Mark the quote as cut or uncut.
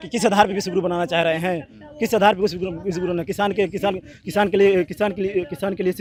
uncut